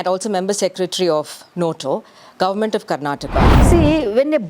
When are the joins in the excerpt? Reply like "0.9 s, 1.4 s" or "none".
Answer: 3.6 s